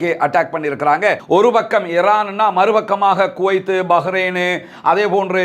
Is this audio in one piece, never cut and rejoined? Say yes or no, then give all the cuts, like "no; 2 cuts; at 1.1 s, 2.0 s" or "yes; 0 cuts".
no; 1 cut; at 1.2 s